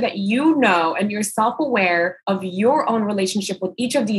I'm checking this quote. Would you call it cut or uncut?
cut